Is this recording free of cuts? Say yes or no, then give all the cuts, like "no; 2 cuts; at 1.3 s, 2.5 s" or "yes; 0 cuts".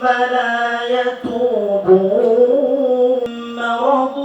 no; 1 cut; at 3.2 s